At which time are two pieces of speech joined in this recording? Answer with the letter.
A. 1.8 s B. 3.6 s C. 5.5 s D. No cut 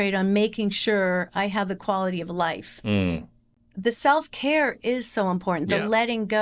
B